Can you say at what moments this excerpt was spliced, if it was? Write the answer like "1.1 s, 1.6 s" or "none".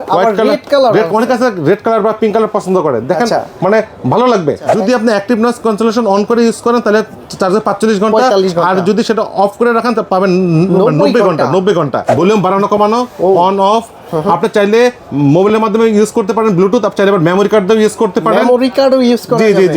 4.8 s, 12.1 s